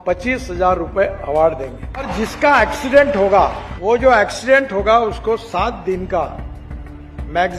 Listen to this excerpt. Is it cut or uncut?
cut